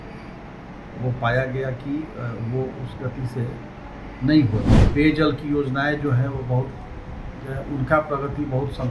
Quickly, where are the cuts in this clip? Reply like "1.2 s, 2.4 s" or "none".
4.8 s